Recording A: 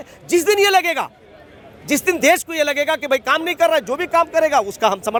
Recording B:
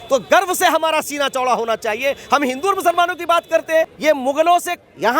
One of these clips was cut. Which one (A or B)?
B